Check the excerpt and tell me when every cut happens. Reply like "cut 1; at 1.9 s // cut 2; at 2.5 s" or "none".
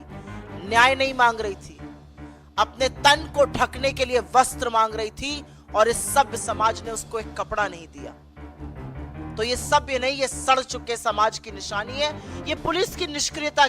cut 1; at 7.7 s // cut 2; at 9.4 s